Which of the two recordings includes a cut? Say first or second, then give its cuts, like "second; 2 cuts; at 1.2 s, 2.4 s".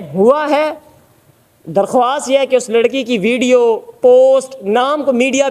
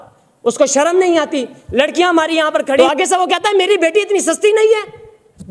second; 1 cut; at 2.8 s